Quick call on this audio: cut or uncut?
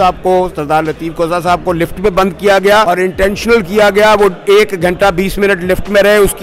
cut